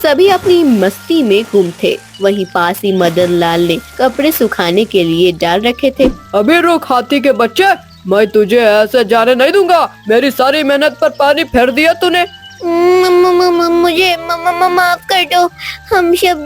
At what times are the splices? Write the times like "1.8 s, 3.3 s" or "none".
6.2 s